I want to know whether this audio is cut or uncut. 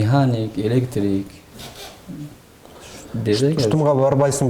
uncut